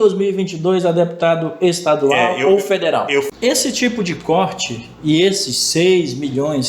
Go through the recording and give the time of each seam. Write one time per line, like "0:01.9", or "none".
0:03.3